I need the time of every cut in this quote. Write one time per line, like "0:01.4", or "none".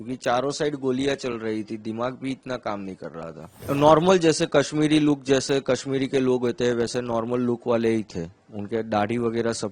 0:03.6

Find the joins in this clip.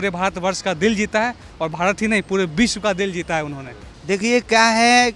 none

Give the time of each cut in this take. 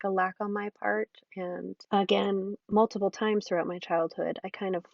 0:01.8
0:02.6

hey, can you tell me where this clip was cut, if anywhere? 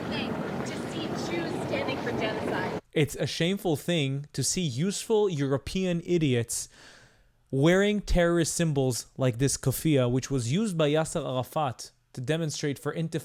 none

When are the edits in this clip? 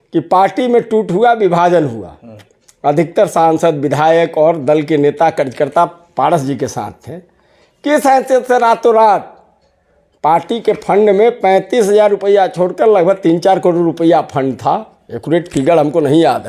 none

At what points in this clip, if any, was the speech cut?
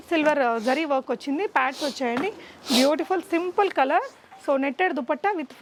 none

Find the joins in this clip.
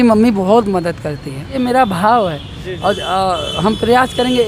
none

